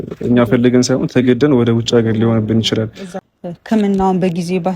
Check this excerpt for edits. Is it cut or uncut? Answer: cut